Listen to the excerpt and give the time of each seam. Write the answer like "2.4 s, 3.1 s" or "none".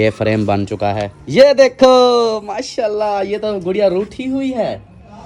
1.1 s